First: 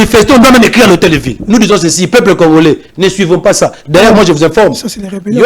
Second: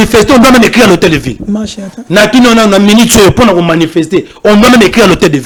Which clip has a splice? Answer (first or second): first